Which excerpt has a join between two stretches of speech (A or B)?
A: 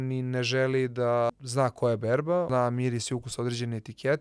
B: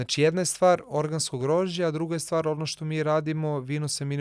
A